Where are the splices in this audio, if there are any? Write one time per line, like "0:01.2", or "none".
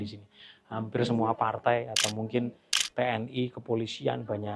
none